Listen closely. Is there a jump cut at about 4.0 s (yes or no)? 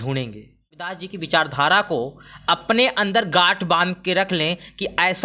no